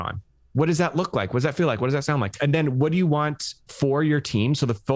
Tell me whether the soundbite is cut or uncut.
cut